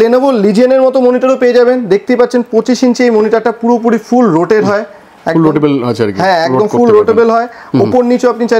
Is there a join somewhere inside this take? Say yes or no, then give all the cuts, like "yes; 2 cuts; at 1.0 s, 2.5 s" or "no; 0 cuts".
no; 0 cuts